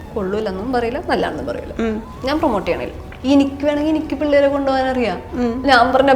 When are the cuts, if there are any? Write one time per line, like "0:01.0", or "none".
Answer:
0:02.1
0:03.1